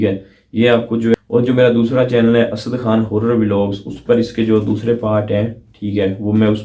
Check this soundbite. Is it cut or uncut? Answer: cut